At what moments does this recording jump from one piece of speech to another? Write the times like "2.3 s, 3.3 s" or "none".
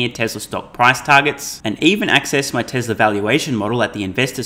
none